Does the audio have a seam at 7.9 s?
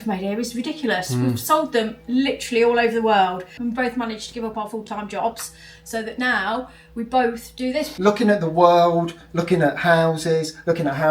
yes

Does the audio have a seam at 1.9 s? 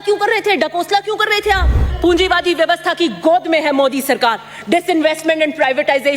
yes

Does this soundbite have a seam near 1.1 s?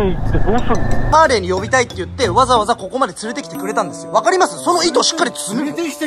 yes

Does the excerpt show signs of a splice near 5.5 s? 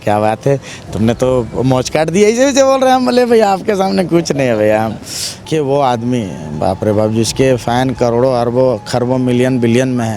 yes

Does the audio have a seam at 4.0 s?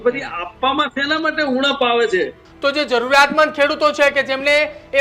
no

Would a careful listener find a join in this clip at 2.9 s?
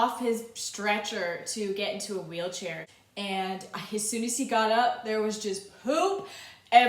yes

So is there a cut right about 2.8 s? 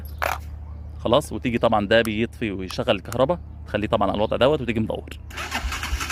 no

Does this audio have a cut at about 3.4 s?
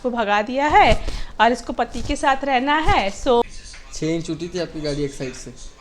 yes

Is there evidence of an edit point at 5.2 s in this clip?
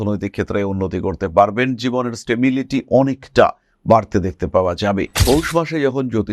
yes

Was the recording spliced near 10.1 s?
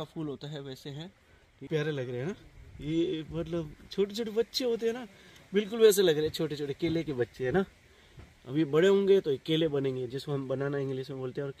no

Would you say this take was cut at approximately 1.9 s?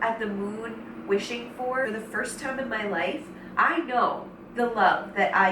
yes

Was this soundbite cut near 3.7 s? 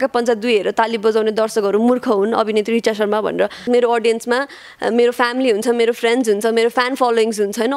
yes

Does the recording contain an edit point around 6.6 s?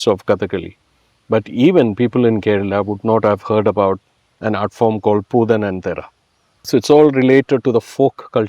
yes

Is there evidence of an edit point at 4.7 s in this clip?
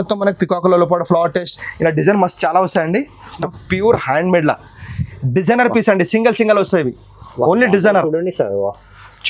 no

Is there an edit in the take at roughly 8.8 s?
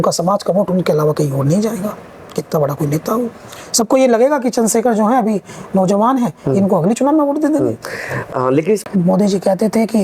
yes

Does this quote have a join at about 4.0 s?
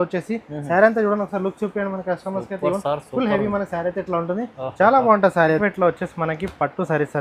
no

